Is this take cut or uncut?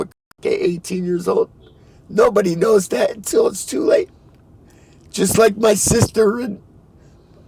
uncut